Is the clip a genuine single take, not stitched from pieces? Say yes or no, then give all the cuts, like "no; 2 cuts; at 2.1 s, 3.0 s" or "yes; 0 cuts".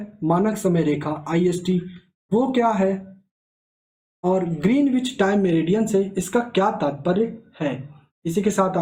yes; 0 cuts